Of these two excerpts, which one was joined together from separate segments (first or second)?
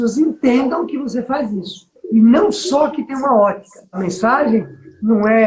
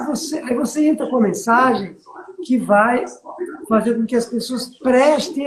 first